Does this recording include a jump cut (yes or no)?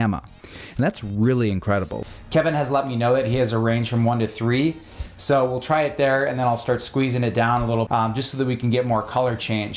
yes